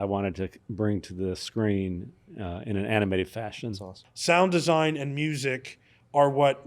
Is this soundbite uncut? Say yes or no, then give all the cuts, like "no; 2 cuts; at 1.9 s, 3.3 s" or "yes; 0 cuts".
no; 1 cut; at 4.1 s